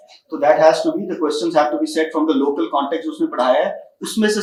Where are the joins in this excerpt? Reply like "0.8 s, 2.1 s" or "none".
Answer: none